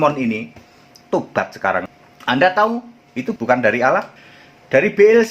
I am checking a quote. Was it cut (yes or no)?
yes